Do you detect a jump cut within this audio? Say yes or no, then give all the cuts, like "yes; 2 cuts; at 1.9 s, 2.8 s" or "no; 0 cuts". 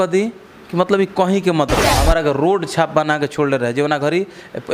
yes; 1 cut; at 1.9 s